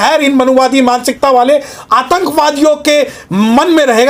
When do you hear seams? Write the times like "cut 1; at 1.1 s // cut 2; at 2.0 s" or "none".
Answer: none